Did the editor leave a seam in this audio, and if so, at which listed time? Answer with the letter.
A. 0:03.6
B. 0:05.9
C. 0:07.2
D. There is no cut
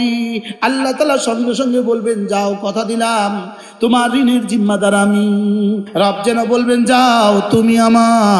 B